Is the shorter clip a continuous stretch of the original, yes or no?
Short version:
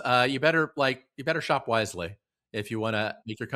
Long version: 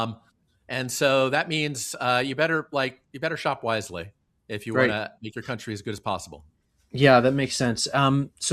yes